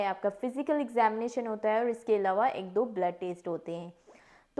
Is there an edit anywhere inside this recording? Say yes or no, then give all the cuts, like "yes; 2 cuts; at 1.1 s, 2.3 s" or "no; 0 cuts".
no; 0 cuts